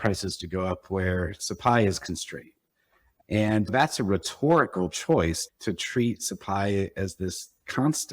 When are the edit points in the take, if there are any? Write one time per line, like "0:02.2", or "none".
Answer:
0:03.7
0:05.4